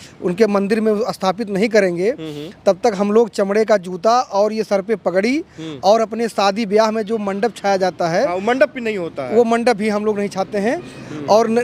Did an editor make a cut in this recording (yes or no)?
no